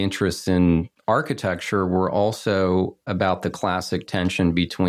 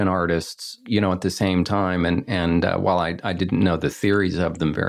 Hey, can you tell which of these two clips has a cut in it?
first; 2 cuts; at 0.9 s, 3.1 s

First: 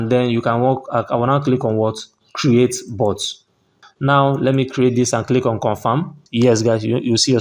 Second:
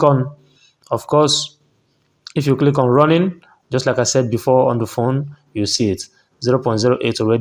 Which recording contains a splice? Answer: first; 2 cuts; at 3.8 s, 6.2 s

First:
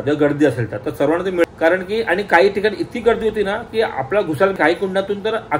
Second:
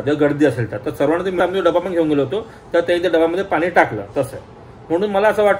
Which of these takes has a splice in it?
first; 2 cuts; at 1.4 s, 4.5 s

